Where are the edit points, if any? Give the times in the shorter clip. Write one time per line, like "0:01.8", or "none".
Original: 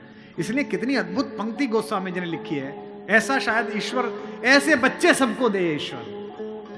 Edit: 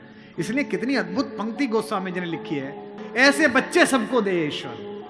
0:02.9